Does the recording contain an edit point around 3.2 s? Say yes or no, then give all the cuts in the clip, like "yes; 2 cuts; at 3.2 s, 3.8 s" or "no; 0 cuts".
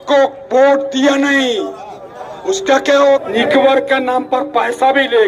yes; 1 cut; at 3.2 s